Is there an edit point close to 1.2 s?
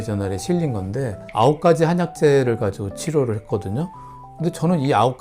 yes; 1 cut; at 1.2 s

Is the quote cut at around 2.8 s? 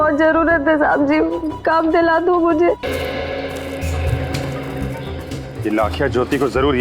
yes; 1 cut; at 2.8 s

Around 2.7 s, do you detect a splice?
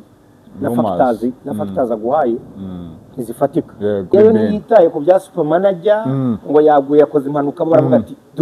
no; 1 cut; at 4.1 s

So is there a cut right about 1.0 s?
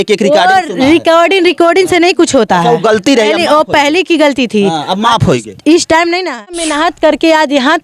no; 1 cut; at 6.6 s

